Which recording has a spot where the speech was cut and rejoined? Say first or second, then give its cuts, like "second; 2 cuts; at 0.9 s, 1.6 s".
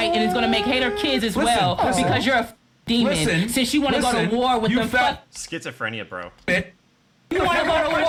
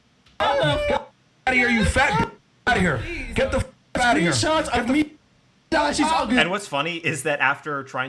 second; 1 cut; at 2.5 s